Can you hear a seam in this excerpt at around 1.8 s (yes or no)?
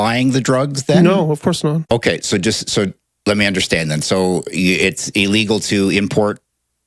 yes